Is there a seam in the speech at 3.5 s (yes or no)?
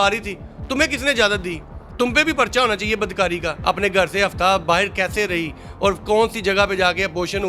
yes